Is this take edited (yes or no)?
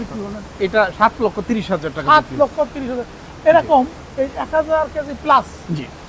no